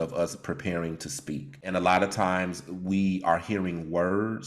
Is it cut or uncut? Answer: cut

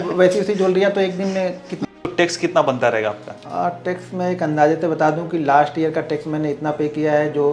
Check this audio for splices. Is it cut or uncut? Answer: cut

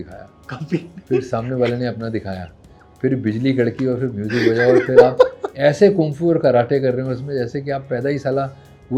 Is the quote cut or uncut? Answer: uncut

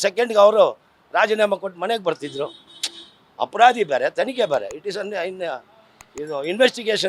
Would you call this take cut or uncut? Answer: uncut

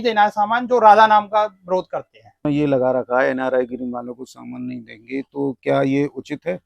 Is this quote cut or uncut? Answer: cut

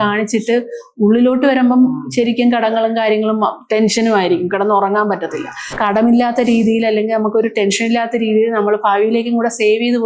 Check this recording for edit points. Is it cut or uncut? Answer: cut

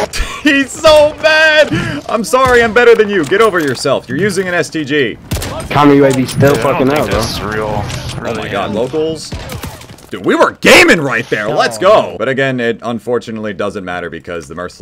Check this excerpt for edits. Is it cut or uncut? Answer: uncut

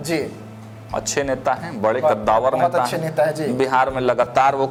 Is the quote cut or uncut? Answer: uncut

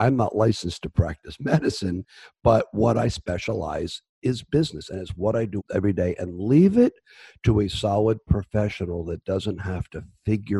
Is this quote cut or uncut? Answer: cut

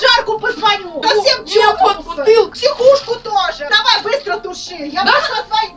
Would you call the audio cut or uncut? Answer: cut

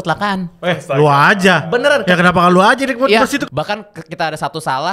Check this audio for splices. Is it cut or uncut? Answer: cut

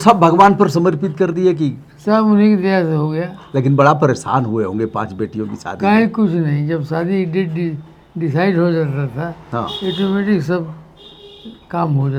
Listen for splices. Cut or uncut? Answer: uncut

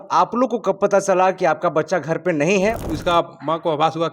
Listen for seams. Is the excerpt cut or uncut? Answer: cut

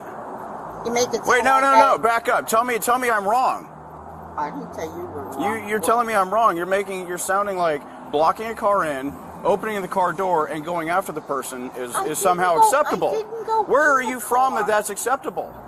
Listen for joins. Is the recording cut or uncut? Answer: uncut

